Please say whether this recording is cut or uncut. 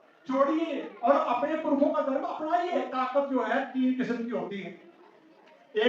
cut